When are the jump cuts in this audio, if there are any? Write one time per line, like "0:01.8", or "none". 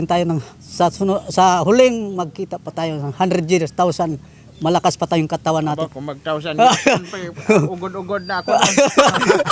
none